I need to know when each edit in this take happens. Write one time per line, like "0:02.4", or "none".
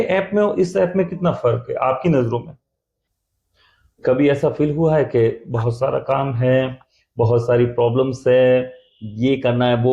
0:03.1